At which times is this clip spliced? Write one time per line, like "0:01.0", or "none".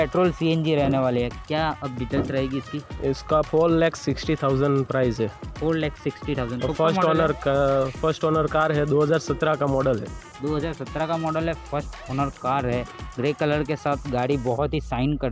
none